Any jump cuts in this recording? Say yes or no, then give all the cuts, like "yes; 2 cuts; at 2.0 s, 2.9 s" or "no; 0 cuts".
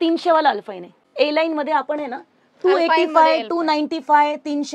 yes; 1 cut; at 1.0 s